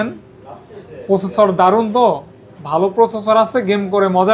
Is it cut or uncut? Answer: uncut